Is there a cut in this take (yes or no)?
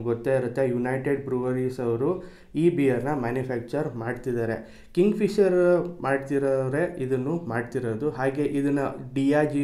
no